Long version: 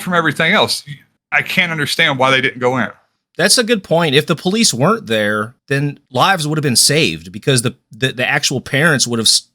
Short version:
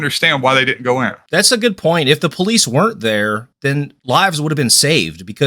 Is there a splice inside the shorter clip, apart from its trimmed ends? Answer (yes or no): yes